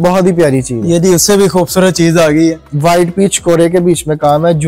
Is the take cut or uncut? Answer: uncut